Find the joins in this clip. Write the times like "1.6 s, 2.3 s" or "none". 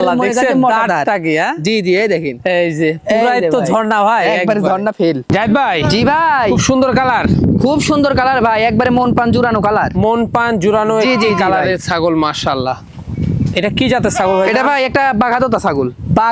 none